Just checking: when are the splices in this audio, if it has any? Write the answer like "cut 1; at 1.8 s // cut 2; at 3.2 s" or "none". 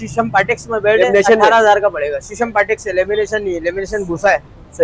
none